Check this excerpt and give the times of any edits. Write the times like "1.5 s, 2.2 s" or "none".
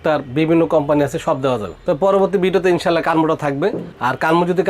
none